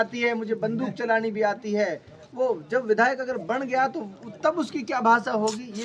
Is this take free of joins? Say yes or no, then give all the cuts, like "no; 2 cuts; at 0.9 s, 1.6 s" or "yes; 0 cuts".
yes; 0 cuts